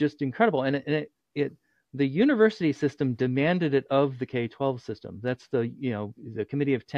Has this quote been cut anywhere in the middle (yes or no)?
no